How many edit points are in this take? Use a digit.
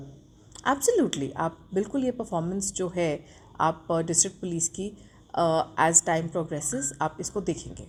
0